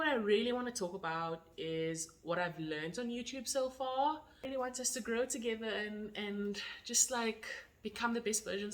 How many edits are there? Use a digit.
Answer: 1